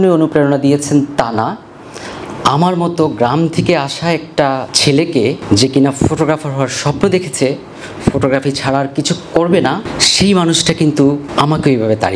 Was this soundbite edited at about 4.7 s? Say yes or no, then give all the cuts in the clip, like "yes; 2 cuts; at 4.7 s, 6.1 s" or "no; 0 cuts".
yes; 4 cuts; at 4.7 s, 5.4 s, 10.0 s, 11.3 s